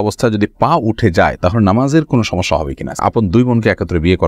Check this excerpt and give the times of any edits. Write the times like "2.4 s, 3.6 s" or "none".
3.0 s